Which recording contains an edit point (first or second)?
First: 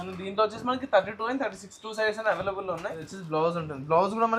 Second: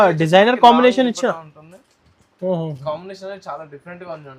first